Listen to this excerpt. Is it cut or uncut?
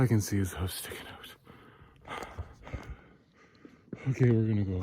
cut